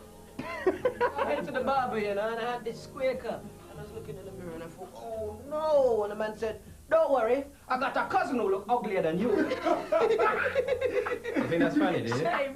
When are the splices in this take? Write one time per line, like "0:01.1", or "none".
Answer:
0:02.3